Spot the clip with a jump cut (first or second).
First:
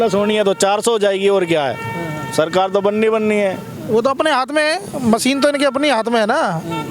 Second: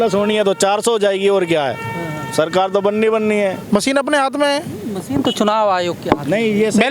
second